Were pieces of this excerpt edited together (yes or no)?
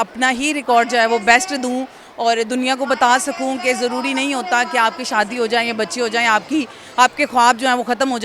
no